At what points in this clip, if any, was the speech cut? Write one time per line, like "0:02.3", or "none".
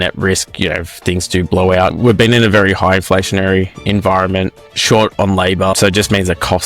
0:01.9
0:05.8

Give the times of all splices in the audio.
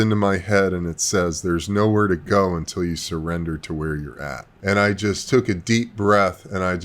0:04.5

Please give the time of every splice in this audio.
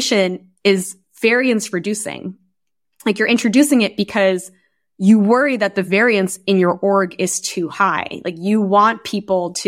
none

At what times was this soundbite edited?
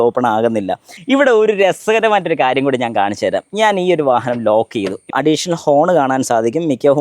0:00.9
0:05.1

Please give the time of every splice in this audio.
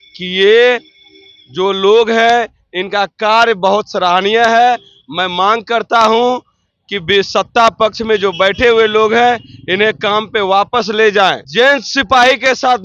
0:11.4

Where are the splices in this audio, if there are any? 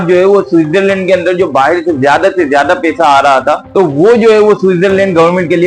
none

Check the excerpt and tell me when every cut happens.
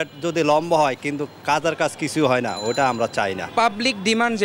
0:03.4

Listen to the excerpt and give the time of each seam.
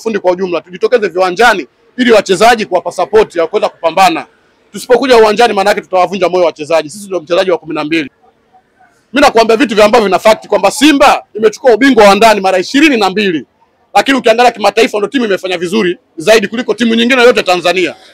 0:08.2

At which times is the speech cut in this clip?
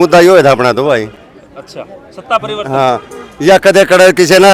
none

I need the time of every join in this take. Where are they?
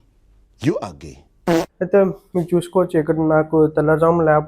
0:01.8

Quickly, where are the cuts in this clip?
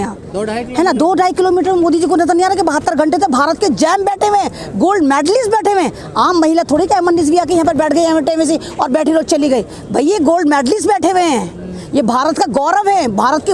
none

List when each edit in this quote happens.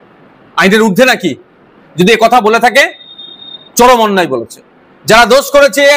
none

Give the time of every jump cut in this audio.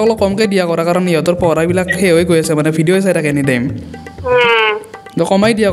none

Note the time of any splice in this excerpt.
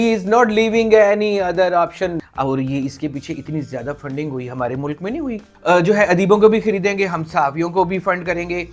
0:02.2
0:05.5

